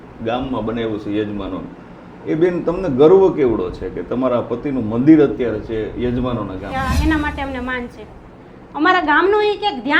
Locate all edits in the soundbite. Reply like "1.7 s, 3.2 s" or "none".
6.7 s